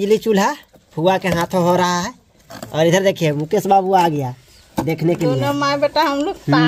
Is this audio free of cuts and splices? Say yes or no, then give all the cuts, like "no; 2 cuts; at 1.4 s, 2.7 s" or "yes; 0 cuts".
yes; 0 cuts